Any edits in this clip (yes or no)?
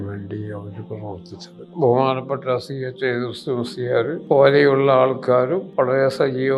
yes